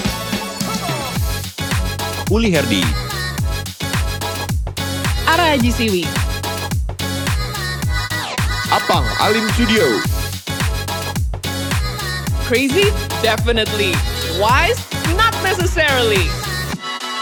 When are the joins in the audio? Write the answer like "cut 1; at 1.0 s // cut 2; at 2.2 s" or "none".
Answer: none

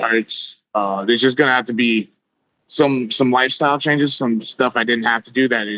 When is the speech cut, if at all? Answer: none

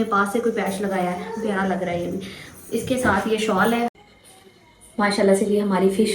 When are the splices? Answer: cut 1; at 4.1 s

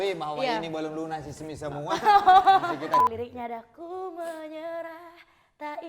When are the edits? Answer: cut 1; at 3.0 s

